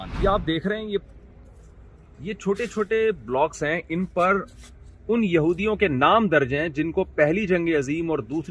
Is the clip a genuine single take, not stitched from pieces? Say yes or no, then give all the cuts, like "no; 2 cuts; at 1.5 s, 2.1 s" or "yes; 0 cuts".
yes; 0 cuts